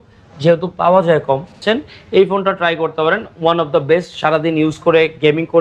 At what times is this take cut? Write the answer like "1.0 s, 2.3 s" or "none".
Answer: 1.6 s